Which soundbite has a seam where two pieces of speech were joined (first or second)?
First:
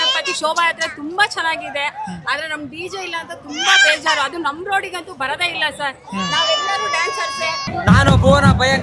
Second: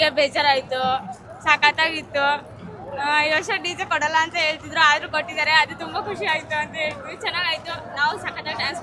first